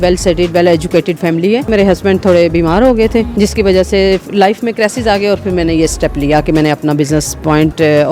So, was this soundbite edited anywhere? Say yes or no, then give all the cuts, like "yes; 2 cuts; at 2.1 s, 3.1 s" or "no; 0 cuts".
yes; 2 cuts; at 1.7 s, 3.3 s